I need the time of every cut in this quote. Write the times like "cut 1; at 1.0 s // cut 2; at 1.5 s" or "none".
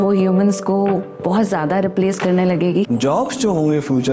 cut 1; at 2.9 s